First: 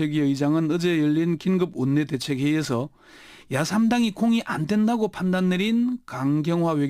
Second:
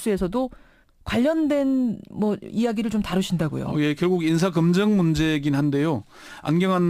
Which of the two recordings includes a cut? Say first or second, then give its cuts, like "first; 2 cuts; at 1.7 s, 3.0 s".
first; 1 cut; at 3.3 s